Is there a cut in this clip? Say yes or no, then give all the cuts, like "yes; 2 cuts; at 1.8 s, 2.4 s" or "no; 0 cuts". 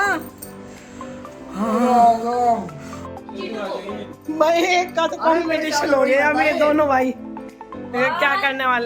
yes; 1 cut; at 3.3 s